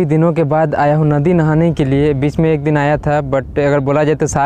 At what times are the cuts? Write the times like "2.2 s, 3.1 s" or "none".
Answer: none